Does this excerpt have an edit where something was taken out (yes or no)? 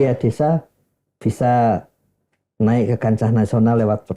no